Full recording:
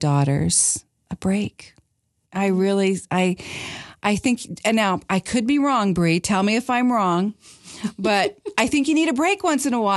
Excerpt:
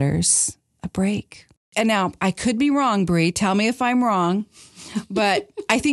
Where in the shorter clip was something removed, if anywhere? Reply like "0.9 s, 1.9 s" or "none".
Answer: 1.6 s